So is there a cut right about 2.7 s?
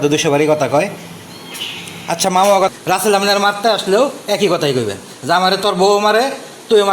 yes; 1 cut; at 2.7 s

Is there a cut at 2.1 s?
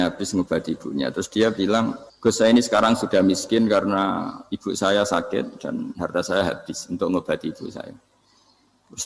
yes; 1 cut; at 2.1 s

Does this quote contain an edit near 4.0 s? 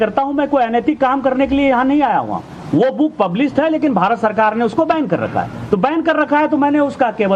no; 1 cut; at 5.8 s

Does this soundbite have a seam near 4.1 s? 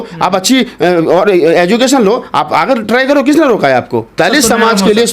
yes; 1 cut; at 4.1 s

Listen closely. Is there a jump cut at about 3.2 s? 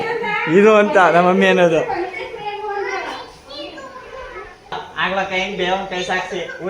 no; 1 cut; at 4.8 s

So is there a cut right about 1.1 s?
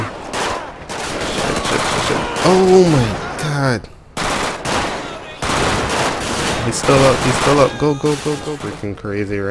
no; 1 cut; at 8.5 s

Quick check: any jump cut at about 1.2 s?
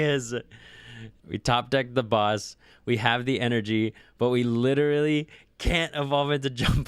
yes; 1 cut; at 1.2 s

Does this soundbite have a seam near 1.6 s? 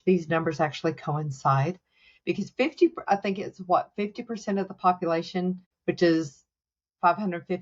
no; 1 cut; at 5.7 s

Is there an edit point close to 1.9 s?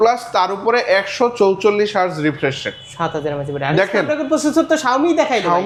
no; 0 cuts

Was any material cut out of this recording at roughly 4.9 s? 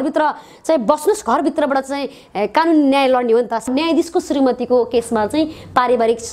no; 1 cut; at 3.6 s

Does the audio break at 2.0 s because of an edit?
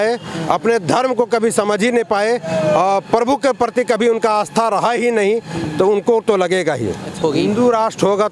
no; 1 cut; at 7.2 s

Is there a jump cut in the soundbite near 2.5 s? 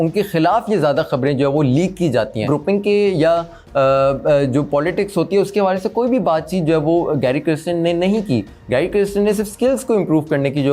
yes; 1 cut; at 2.5 s

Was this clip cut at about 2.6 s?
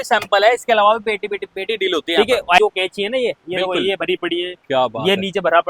yes; 1 cut; at 2.6 s

